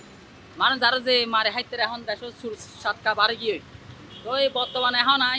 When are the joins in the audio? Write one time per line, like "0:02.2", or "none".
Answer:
none